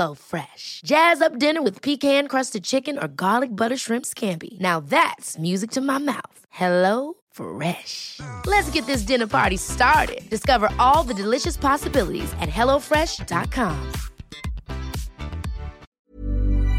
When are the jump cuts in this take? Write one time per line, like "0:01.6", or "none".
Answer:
0:15.8